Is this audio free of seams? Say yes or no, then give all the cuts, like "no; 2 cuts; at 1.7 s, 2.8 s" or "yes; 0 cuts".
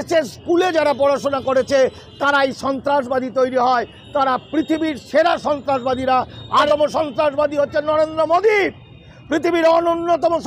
no; 1 cut; at 6.7 s